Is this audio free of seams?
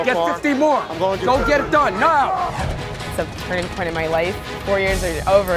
no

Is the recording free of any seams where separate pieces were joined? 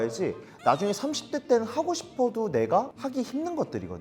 no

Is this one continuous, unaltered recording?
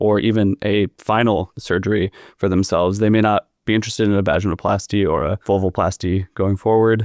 no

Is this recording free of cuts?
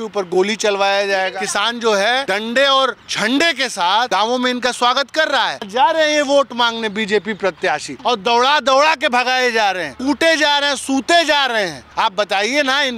no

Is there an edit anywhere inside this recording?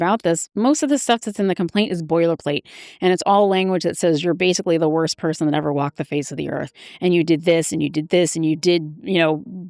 no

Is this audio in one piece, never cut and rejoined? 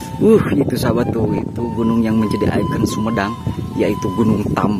yes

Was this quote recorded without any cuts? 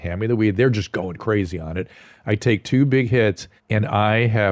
no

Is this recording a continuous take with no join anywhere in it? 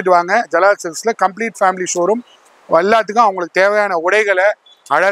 yes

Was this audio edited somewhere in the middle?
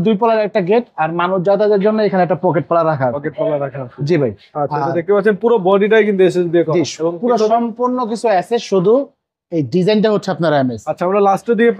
no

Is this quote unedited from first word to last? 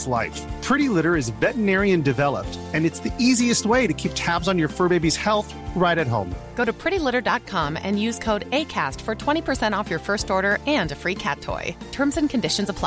yes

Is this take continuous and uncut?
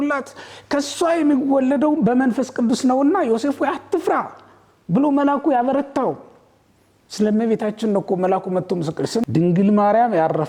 no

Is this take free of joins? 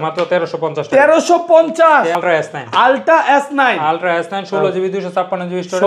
no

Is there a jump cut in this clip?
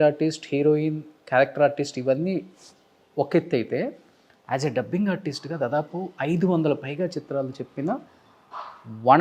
no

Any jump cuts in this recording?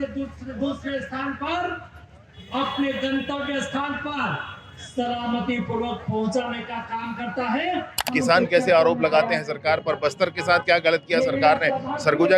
yes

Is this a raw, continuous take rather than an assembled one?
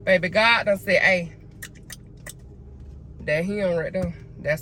yes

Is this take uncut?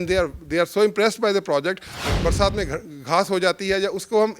no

